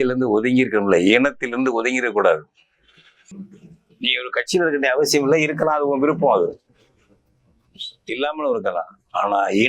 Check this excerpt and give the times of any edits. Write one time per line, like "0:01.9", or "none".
0:03.2